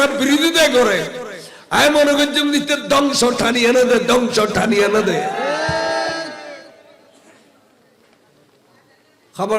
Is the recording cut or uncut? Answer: uncut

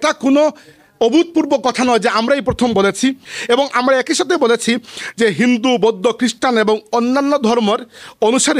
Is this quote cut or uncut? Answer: cut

